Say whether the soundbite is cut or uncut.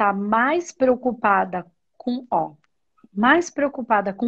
uncut